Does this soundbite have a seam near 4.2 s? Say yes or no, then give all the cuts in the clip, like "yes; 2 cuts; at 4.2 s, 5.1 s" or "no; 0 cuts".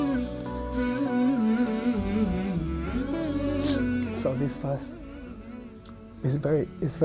yes; 1 cut; at 4.2 s